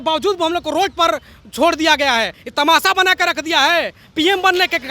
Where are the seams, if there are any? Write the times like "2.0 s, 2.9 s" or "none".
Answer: 2.4 s